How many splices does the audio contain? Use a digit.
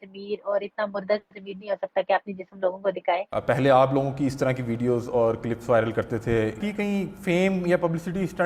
2